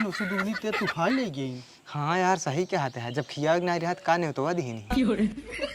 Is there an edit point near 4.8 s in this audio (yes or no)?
yes